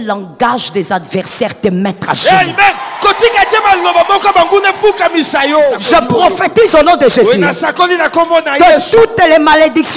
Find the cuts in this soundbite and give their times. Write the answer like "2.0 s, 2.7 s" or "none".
5.8 s